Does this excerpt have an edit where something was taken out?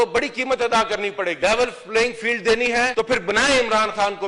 yes; 2 cuts; at 1.4 s, 2.9 s

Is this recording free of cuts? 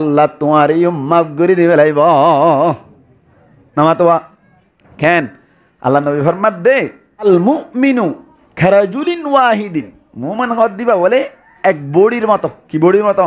no; 1 cut; at 7.2 s

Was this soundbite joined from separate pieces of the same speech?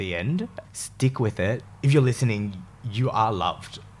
yes; 1 cut; at 1.7 s

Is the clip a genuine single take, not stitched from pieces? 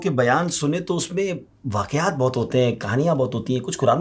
yes; 0 cuts

